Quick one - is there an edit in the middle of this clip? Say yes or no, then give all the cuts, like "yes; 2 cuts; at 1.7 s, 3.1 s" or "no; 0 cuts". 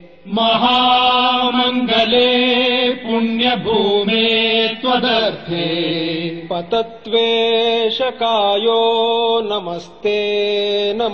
yes; 1 cut; at 4.2 s